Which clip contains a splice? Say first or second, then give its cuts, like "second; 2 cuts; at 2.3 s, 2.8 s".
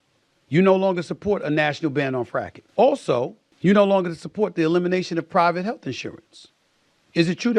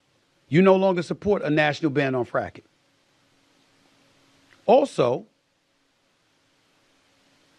first; 2 cuts; at 2.6 s, 3.4 s